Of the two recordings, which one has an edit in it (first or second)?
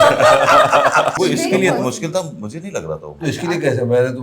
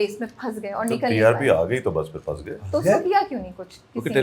first